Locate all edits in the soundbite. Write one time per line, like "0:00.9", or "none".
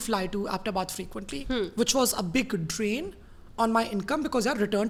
none